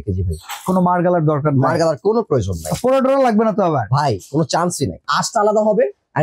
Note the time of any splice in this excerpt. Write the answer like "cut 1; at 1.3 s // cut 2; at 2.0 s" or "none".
cut 1; at 5.1 s